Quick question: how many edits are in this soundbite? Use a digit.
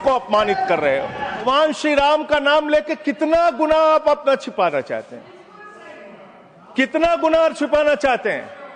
1